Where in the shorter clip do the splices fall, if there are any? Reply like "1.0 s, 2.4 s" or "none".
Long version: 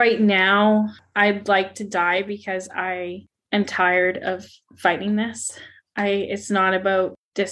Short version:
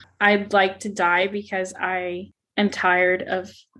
none